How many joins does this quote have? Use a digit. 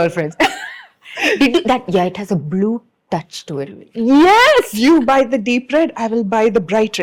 0